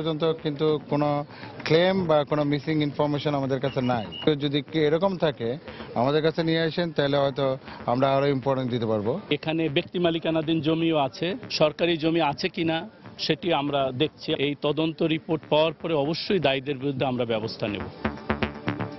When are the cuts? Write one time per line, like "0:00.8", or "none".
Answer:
0:04.3
0:09.3
0:14.4
0:18.1